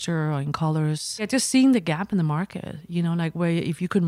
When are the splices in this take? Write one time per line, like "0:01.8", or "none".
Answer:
0:01.3

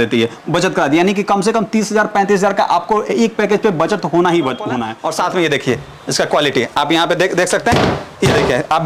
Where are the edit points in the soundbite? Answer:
0:04.9

